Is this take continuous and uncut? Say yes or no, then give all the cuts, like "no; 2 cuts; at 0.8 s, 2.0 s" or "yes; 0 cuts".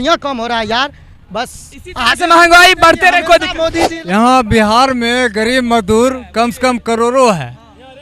no; 1 cut; at 3.9 s